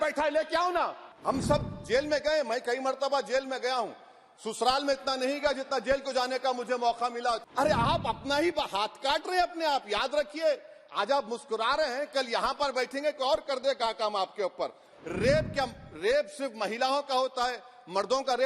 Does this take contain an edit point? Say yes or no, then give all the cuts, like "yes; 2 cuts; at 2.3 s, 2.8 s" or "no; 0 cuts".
yes; 3 cuts; at 1.1 s, 7.4 s, 14.9 s